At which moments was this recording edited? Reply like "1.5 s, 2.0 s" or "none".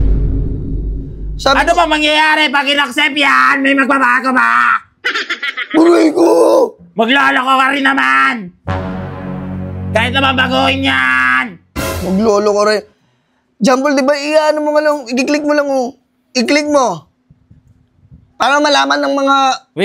none